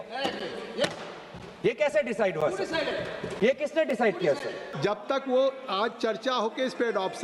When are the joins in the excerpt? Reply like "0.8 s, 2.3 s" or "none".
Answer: 4.6 s

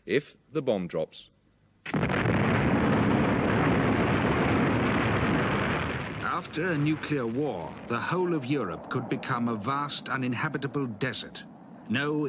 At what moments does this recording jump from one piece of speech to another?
none

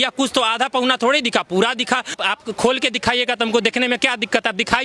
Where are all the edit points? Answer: 2.2 s

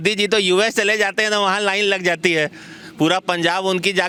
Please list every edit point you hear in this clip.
none

